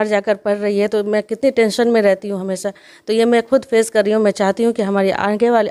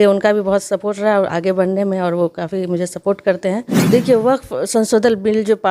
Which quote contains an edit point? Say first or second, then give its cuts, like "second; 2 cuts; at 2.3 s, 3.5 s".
second; 1 cut; at 3.7 s